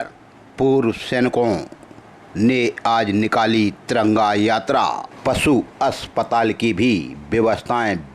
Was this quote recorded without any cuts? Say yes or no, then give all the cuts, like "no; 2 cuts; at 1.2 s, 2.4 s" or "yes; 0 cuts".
no; 1 cut; at 5.1 s